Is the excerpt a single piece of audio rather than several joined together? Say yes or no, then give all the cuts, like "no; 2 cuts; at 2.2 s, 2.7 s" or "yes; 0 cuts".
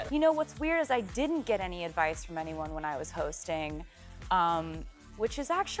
yes; 0 cuts